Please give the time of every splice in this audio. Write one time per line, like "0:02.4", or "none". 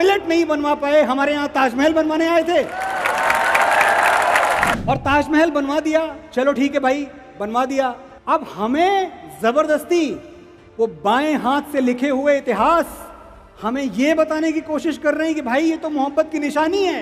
0:04.8
0:08.1